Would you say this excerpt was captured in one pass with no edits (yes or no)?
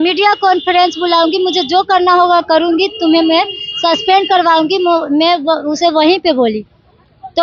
yes